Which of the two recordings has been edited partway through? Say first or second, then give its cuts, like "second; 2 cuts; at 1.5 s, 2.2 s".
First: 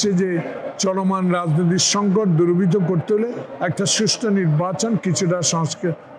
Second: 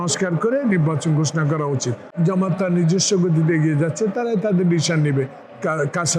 second; 1 cut; at 2.1 s